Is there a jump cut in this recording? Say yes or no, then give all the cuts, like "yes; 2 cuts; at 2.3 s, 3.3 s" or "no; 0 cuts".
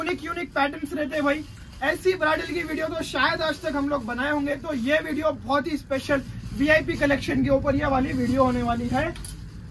no; 0 cuts